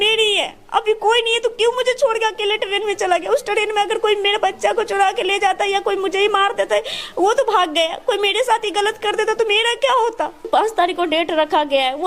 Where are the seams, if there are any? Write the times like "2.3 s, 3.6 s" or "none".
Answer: 10.4 s